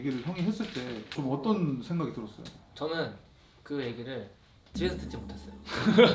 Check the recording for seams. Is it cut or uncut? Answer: cut